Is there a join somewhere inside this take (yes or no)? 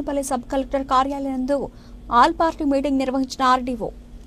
no